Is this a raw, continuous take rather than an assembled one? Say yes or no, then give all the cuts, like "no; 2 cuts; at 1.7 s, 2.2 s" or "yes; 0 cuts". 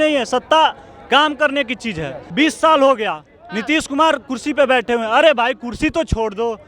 no; 1 cut; at 2.2 s